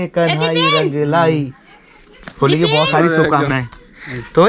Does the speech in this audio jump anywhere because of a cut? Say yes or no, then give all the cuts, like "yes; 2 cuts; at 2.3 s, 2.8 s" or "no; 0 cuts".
no; 0 cuts